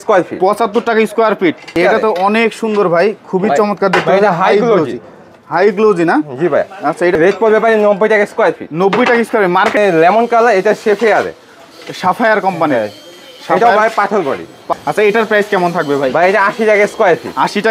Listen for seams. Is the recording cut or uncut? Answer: cut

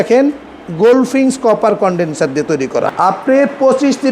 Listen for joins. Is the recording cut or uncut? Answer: cut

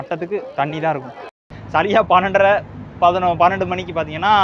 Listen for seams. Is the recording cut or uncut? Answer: cut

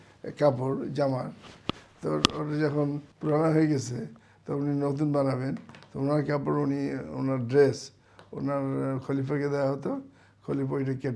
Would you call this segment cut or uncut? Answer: cut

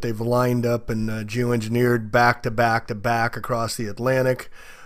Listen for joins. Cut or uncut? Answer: uncut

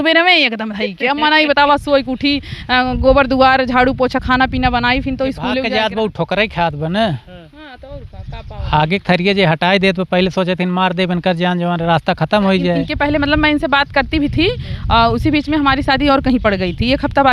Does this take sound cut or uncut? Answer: cut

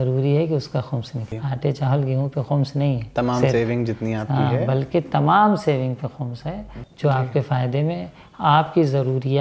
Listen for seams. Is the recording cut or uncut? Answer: cut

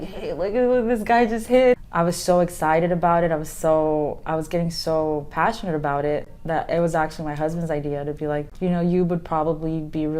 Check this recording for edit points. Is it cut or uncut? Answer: cut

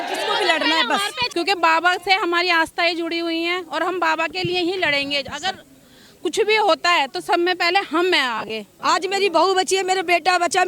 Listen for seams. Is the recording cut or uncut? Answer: cut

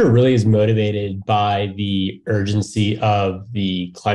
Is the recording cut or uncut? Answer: uncut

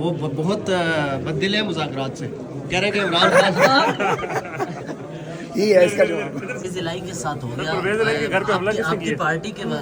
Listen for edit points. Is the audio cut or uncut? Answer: uncut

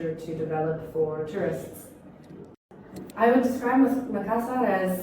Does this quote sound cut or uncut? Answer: cut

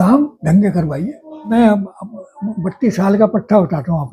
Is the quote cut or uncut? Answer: cut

